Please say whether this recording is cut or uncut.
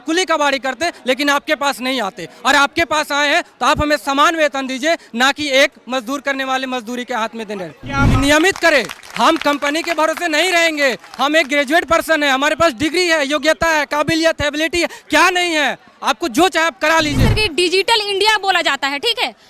cut